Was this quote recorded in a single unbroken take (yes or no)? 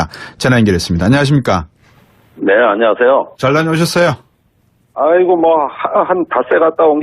yes